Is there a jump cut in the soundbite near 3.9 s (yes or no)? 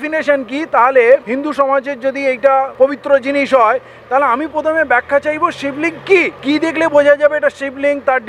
no